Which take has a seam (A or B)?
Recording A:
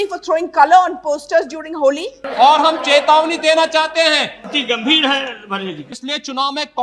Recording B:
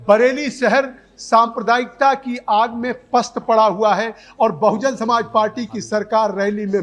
A